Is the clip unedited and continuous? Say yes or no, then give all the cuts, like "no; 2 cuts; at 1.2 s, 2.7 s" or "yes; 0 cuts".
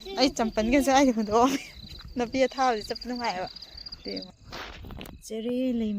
no; 1 cut; at 4.3 s